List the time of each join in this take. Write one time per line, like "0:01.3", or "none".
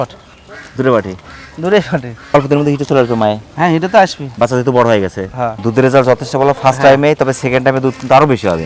none